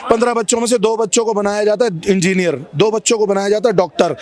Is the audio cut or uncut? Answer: uncut